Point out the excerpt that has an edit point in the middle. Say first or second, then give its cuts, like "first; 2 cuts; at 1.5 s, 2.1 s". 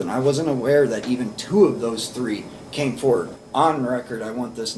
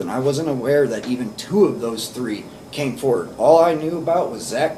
first; 1 cut; at 3.3 s